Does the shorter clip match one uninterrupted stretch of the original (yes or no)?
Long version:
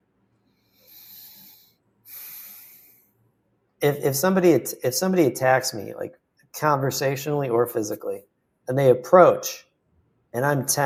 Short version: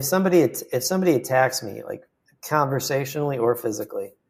yes